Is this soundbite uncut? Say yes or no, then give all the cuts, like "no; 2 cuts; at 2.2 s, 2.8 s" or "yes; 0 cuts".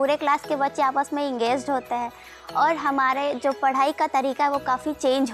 yes; 0 cuts